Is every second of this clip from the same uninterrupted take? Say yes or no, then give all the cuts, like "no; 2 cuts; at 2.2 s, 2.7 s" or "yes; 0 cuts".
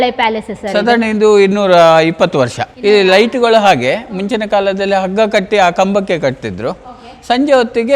no; 1 cut; at 2.6 s